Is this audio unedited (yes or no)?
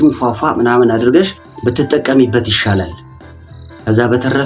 no